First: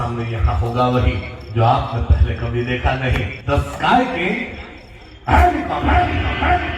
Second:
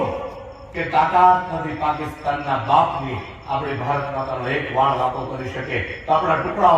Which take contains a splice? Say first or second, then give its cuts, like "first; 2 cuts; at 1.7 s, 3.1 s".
first; 1 cut; at 3.3 s